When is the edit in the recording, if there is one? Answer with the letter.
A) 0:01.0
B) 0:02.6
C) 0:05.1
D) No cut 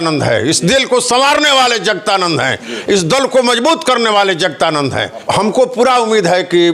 C